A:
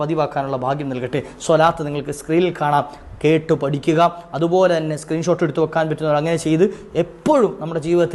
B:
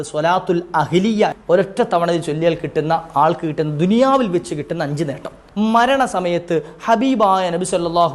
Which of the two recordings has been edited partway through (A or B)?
B